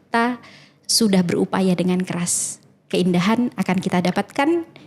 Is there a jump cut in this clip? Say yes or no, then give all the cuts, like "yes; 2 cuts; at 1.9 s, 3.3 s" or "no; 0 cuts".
no; 0 cuts